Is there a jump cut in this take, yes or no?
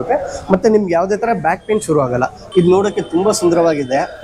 yes